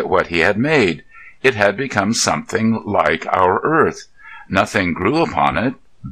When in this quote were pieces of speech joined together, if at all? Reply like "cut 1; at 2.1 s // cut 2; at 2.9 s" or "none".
cut 1; at 3.1 s